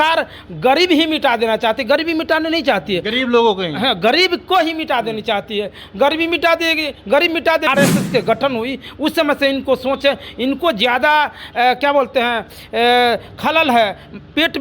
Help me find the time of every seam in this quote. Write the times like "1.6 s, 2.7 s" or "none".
7.7 s